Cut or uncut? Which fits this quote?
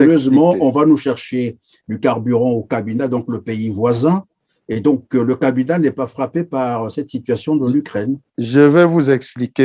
uncut